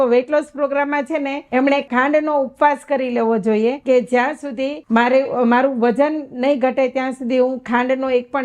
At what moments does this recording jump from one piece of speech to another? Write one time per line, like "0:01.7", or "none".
0:01.7
0:03.8
0:04.8